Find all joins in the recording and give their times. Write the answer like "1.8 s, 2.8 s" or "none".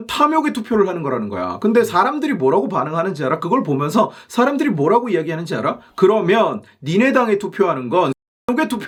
none